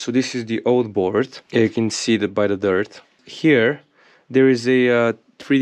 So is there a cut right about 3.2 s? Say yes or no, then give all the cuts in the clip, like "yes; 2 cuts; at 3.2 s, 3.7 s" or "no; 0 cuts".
yes; 2 cuts; at 1.4 s, 3.2 s